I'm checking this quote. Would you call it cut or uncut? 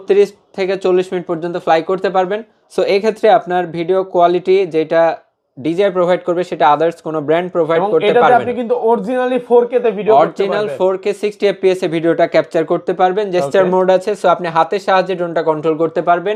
uncut